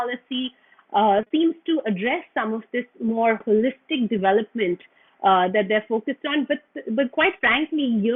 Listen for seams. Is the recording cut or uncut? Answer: uncut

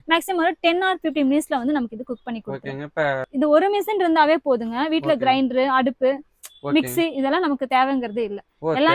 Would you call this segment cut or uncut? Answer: cut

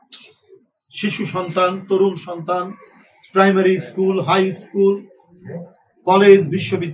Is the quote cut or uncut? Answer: uncut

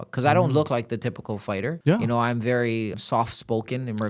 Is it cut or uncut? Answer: cut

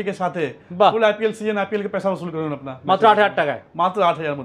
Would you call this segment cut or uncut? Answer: uncut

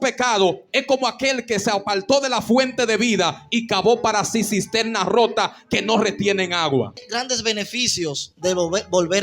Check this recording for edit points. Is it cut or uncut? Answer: cut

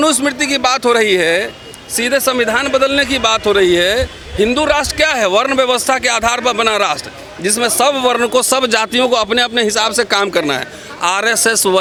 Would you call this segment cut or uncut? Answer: uncut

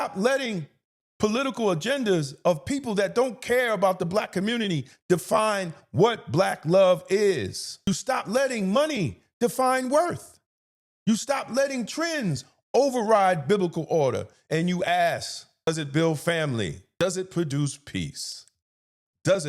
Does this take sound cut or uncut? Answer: cut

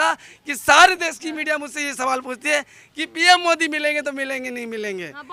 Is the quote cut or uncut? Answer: uncut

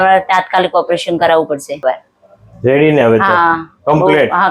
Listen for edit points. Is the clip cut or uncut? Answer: cut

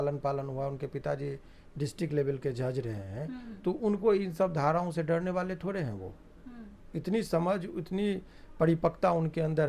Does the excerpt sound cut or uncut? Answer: uncut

